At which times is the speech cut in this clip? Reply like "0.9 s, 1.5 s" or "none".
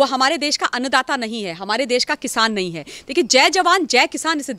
none

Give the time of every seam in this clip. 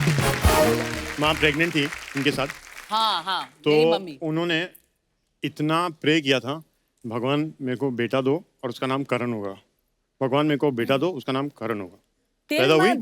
1.0 s

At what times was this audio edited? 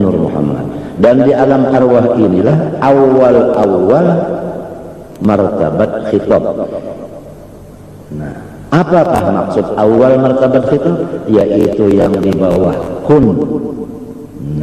none

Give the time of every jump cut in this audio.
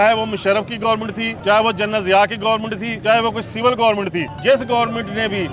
1.3 s, 2.9 s, 4.3 s

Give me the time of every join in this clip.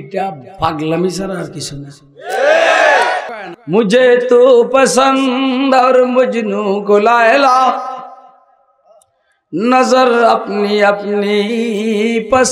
3.3 s

